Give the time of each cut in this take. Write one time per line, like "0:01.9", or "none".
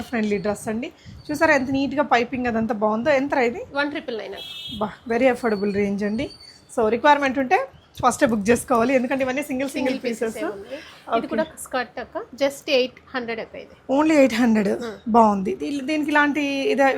none